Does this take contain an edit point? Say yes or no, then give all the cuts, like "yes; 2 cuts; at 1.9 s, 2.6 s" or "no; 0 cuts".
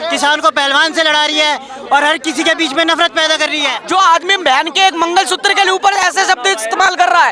yes; 1 cut; at 3.7 s